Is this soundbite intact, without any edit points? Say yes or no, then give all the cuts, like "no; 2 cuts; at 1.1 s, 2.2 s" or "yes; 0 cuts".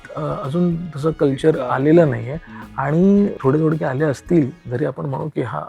no; 1 cut; at 3.4 s